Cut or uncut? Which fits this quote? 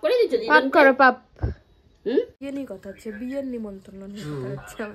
cut